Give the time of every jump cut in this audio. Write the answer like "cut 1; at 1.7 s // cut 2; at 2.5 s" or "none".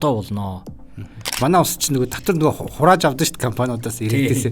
cut 1; at 1.3 s